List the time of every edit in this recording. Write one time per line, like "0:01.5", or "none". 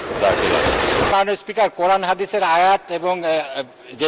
0:01.1

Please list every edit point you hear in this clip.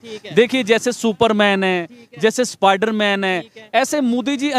none

